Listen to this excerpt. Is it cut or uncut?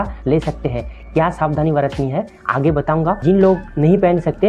cut